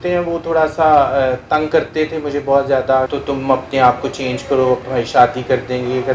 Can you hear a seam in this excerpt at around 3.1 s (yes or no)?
yes